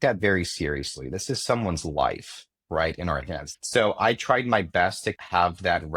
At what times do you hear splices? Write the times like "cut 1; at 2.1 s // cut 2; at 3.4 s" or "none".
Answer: cut 1; at 3.5 s